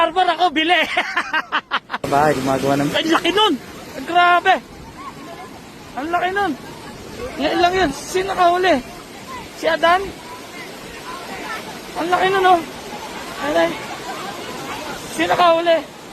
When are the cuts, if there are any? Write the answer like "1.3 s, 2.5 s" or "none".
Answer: 2.0 s